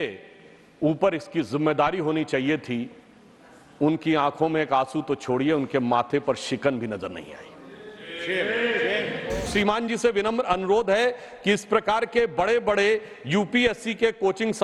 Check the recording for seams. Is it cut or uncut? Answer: cut